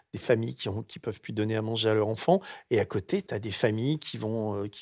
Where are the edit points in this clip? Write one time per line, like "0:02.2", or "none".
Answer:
0:03.2